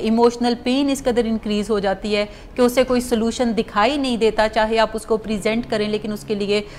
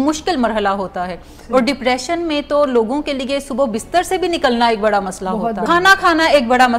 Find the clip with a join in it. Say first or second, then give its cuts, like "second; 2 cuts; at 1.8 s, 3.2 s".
second; 1 cut; at 5.6 s